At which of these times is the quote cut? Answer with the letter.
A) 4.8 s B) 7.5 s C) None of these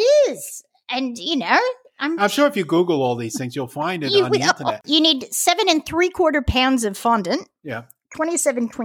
A